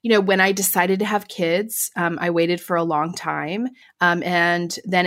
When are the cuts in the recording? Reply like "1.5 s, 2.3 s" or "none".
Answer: 3.8 s